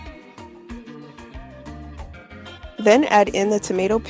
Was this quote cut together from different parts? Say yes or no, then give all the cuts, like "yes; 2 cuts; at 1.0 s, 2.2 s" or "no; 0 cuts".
yes; 2 cuts; at 1.5 s, 2.2 s